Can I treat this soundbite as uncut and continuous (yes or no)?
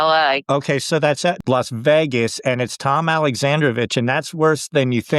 no